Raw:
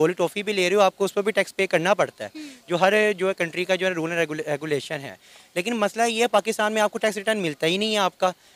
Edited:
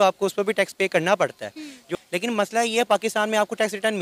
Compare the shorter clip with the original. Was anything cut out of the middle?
yes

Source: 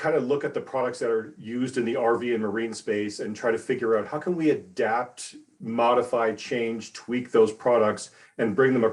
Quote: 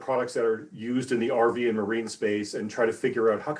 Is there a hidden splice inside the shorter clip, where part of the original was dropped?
no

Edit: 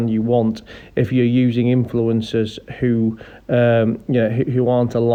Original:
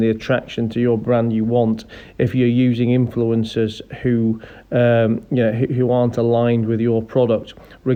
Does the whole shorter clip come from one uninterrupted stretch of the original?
yes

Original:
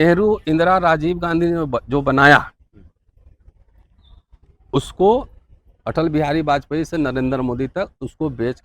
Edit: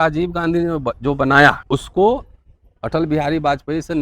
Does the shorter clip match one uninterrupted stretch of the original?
no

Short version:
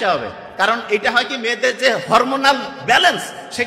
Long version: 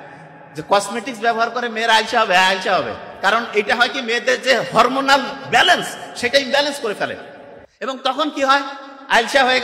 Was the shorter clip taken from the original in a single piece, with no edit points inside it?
yes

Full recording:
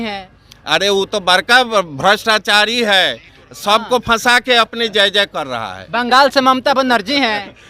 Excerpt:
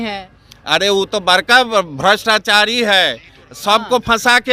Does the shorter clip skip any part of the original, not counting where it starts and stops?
no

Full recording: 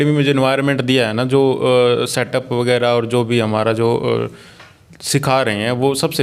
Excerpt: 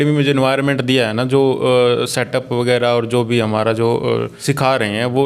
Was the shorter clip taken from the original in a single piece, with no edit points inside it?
no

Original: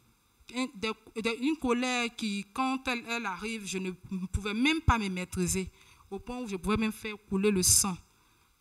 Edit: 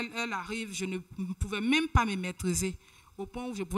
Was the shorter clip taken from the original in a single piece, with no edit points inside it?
yes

